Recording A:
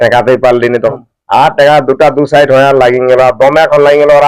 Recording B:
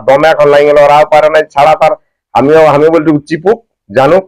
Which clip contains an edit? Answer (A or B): A